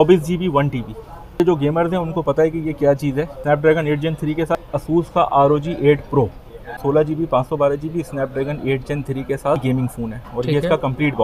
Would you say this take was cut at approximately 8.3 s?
no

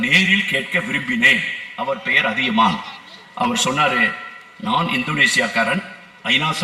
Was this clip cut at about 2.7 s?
no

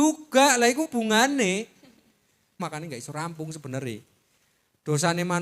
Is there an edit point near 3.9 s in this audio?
no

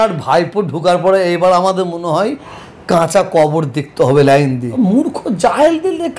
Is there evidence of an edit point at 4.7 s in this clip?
yes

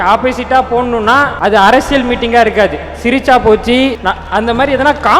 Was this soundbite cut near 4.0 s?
yes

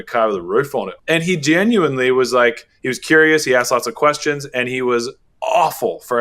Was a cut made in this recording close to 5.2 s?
yes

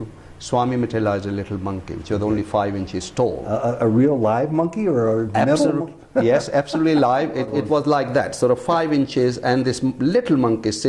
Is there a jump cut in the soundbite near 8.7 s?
no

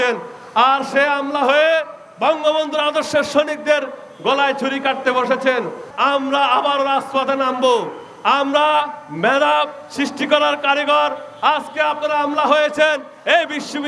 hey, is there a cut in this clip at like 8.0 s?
no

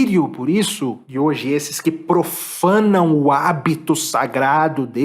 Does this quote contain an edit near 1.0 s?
yes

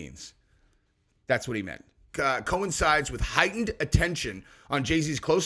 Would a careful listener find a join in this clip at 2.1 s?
yes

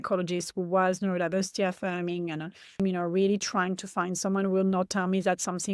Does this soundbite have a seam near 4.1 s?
no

